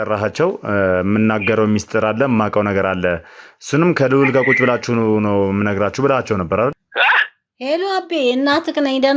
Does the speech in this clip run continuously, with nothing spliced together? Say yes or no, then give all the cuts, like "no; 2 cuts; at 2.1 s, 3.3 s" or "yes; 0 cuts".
no; 1 cut; at 6.8 s